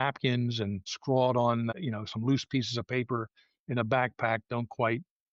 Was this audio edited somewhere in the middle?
yes; 2 cuts; at 0.9 s, 1.7 s

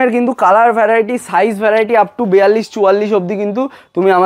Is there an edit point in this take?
no; 0 cuts

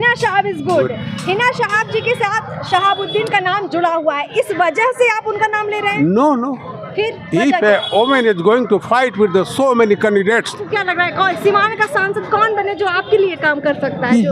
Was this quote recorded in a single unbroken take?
no; 1 cut; at 10.7 s

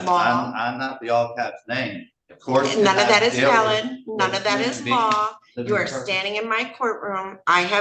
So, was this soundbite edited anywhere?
no; 0 cuts

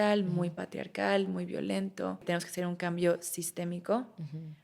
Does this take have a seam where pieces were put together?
yes; 1 cut; at 2.2 s

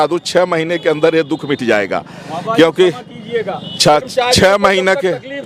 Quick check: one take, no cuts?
yes; 0 cuts

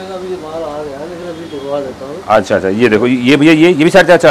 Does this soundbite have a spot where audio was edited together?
no; 0 cuts

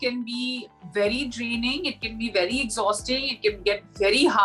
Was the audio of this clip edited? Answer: no; 0 cuts

